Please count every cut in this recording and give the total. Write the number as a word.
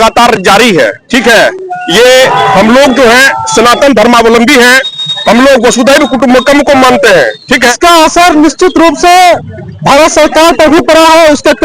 one